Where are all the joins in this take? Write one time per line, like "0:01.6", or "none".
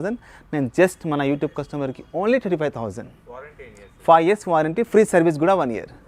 none

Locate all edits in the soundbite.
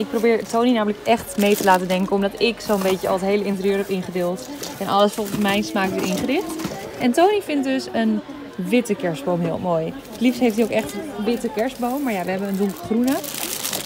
none

